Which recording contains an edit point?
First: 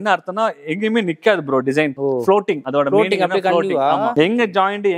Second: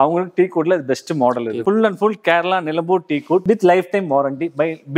second; 1 cut; at 1.6 s

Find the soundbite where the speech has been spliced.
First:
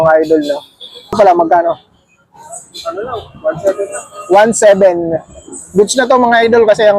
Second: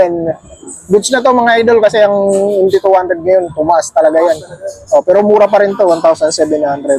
first; 1 cut; at 1.1 s

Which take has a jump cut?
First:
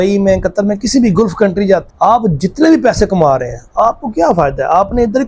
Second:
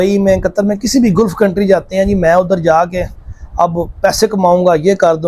first; 1 cut; at 1.9 s

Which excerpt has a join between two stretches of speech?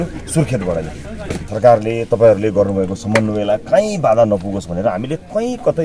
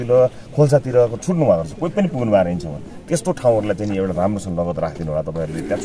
first; 1 cut; at 1.5 s

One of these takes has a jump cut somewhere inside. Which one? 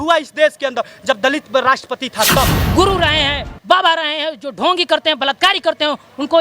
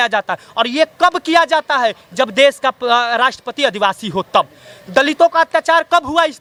first; 1 cut; at 2.6 s

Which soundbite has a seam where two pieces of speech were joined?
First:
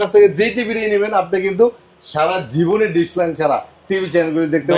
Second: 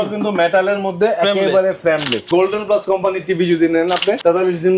second; 1 cut; at 2.3 s

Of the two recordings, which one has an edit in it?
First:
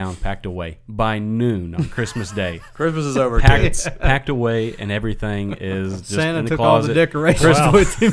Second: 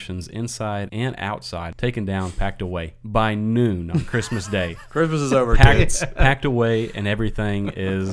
second; 1 cut; at 1.1 s

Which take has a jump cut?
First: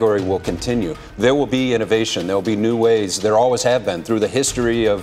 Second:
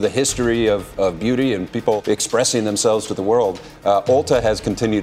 second; 1 cut; at 2.0 s

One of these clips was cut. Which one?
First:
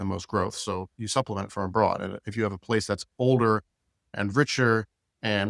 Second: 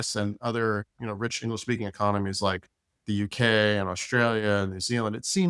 first; 1 cut; at 4.1 s

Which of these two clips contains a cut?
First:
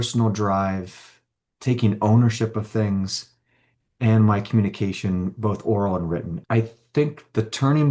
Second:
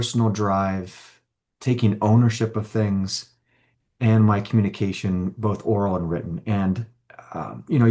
first; 1 cut; at 6.3 s

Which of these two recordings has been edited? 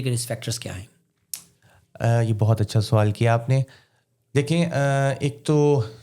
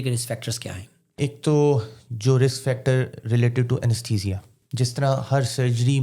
second; 2 cuts; at 1.2 s, 4.6 s

